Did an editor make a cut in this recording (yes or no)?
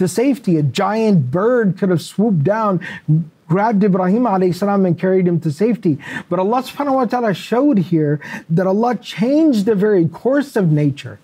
no